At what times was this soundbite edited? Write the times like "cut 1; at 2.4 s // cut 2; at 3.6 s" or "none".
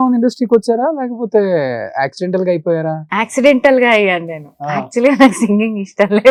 none